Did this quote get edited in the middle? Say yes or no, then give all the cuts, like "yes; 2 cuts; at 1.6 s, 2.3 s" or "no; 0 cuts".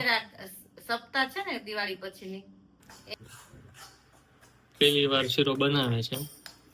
yes; 1 cut; at 3.1 s